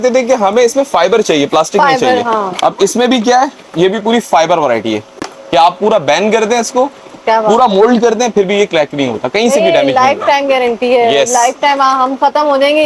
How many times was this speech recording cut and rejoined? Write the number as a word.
zero